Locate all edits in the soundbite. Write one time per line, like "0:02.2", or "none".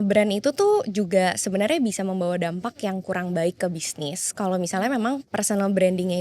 0:05.3